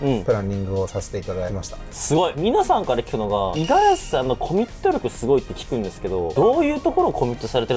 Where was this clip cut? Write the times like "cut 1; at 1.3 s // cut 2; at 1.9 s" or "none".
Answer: none